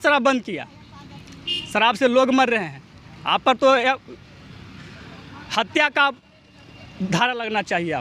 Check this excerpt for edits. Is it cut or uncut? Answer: uncut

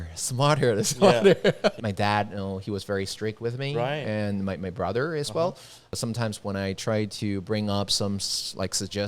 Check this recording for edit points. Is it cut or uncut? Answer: cut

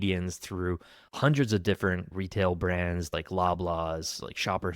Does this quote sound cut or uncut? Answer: cut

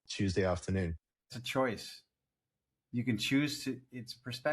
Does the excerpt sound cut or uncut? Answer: cut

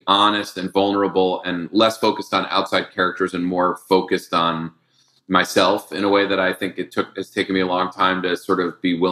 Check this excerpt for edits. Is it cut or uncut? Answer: uncut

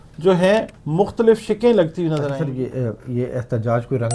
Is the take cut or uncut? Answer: cut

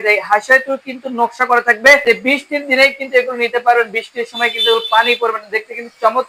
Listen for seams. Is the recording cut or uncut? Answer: cut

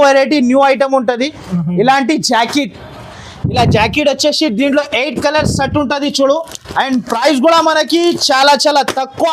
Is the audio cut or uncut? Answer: uncut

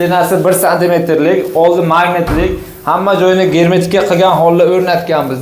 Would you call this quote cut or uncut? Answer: uncut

